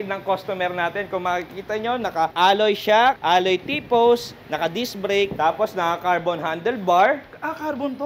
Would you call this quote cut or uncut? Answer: cut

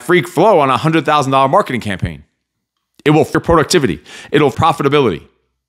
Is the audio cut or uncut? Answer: cut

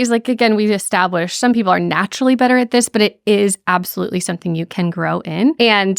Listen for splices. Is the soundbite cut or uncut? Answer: uncut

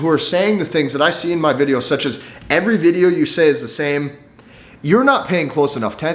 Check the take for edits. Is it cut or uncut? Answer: uncut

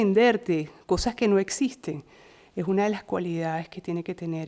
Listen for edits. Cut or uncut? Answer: uncut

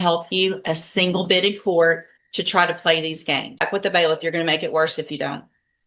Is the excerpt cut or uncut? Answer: cut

